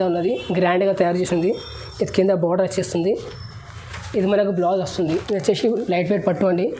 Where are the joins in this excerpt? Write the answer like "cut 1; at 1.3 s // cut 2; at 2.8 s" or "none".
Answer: cut 1; at 5.1 s